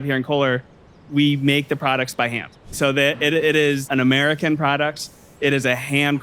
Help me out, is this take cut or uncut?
cut